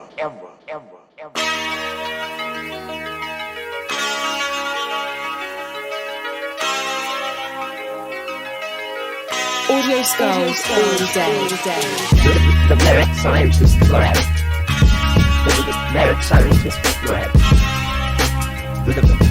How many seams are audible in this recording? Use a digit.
1